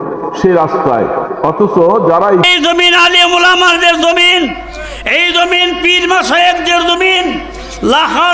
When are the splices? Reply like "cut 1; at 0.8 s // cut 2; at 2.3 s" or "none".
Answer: cut 1; at 2.4 s